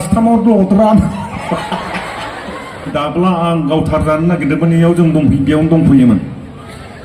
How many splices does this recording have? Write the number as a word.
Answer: one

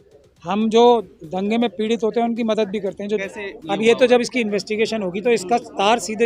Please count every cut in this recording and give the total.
one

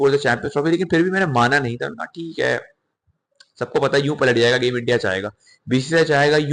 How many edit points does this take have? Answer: zero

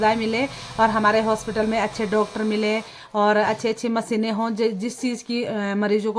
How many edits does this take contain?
zero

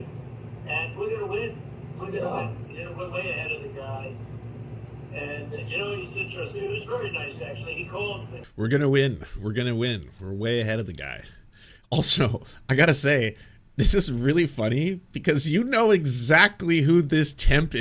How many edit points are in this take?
one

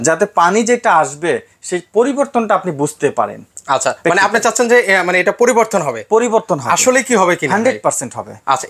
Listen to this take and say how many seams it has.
zero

